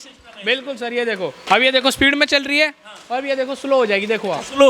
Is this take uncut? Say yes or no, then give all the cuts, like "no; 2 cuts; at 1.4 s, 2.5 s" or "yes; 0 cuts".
no; 1 cut; at 1.4 s